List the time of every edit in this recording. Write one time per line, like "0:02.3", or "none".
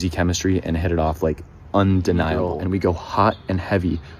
0:02.6